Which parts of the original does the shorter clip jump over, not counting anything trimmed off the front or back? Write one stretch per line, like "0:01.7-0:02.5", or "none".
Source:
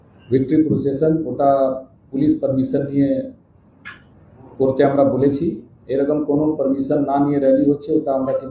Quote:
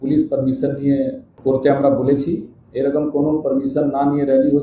0:03.4-0:04.4